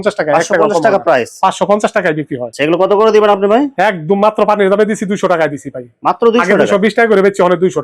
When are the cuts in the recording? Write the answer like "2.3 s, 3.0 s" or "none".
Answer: none